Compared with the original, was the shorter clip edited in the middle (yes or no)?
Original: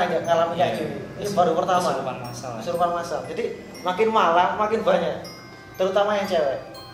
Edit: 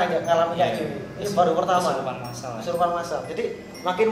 no